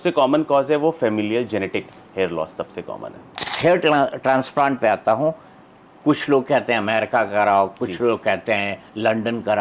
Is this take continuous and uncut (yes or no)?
no